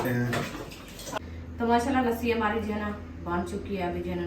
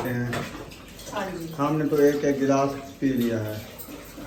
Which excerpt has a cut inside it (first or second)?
first